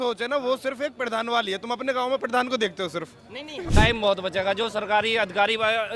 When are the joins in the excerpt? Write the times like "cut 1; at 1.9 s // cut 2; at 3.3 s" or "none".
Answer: cut 1; at 3.6 s